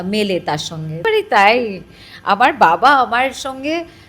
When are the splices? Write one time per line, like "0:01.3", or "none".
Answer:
0:01.0